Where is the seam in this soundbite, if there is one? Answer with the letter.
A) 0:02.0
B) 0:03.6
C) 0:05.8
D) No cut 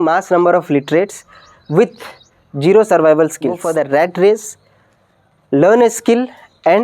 B